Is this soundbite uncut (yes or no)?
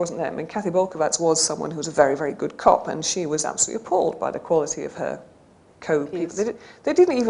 no